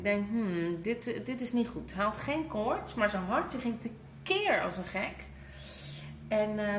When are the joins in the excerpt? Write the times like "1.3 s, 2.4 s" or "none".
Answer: none